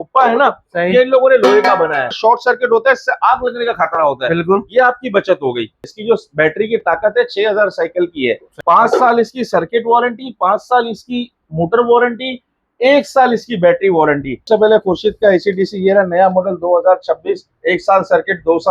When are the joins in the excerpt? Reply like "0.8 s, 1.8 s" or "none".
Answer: 2.2 s, 5.9 s, 8.5 s, 14.4 s